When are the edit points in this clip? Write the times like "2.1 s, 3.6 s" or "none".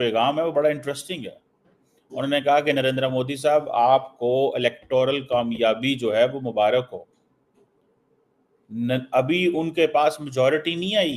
none